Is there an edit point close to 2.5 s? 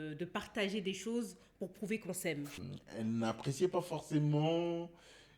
yes; 1 cut; at 2.5 s

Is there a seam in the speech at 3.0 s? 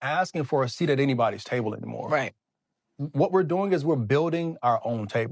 yes; 1 cut; at 3.0 s

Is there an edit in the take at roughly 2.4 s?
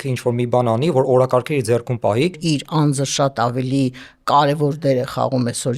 yes; 1 cut; at 2.4 s

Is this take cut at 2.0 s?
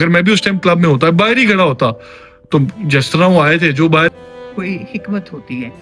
no; 1 cut; at 4.1 s

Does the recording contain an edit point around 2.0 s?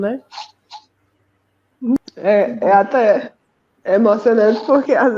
yes; 1 cut; at 2.0 s

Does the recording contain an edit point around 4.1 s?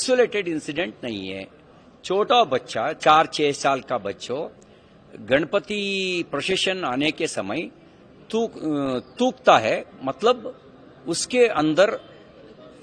no; 0 cuts

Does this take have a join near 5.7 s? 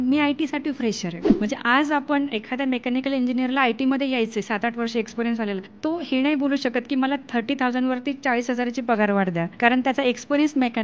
yes; 3 cuts; at 1.2 s, 5.7 s, 9.5 s

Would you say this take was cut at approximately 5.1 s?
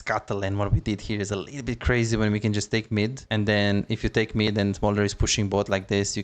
no; 1 cut; at 3.2 s

